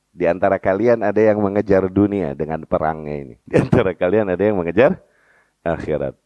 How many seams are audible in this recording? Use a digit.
1